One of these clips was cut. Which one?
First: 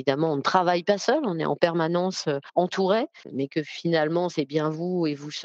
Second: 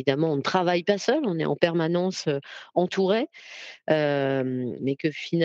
first; 2 cuts; at 2.4 s, 3.2 s

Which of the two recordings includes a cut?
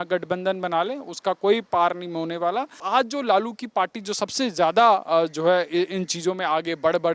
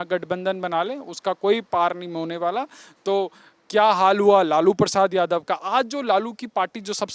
first; 1 cut; at 2.8 s

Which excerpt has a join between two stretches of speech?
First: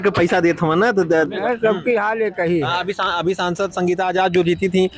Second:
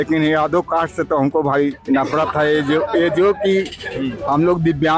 first; 1 cut; at 1.4 s

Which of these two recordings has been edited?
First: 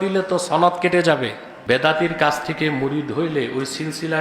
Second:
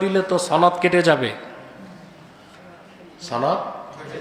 first; 1 cut; at 1.5 s

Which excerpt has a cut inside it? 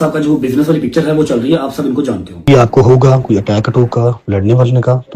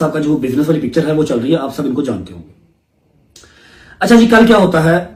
first; 1 cut; at 2.4 s

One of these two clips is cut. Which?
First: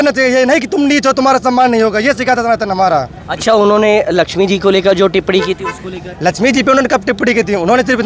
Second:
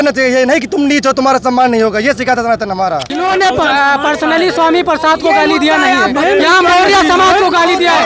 second; 1 cut; at 3.1 s

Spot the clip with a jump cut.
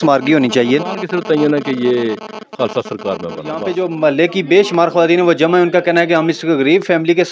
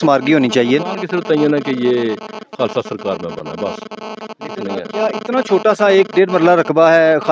first; 1 cut; at 3.6 s

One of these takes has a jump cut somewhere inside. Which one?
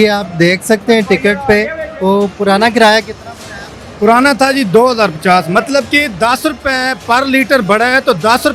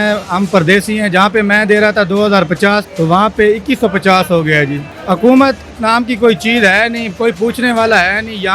second; 2 cuts; at 2.9 s, 4.9 s

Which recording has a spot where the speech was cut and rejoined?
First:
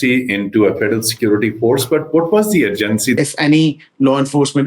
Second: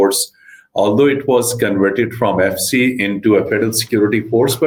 first; 1 cut; at 3.2 s

